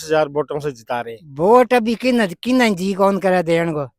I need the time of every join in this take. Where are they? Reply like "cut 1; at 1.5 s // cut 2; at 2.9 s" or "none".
cut 1; at 1.2 s